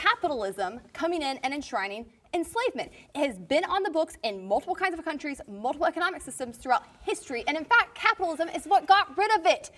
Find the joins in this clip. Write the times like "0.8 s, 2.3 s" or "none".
none